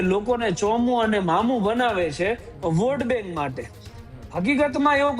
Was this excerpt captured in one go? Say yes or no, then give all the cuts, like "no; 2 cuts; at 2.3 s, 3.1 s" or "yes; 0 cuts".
yes; 0 cuts